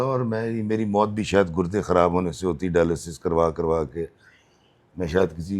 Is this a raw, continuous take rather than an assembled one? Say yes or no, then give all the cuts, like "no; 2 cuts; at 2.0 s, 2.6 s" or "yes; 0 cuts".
yes; 0 cuts